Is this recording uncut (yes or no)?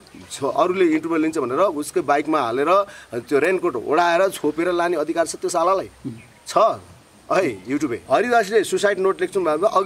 no